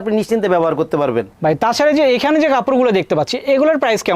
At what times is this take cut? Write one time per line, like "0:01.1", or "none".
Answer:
0:01.3